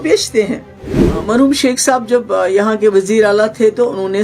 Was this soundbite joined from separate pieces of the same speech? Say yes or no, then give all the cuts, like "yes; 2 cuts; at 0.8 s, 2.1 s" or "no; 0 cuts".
yes; 1 cut; at 1.1 s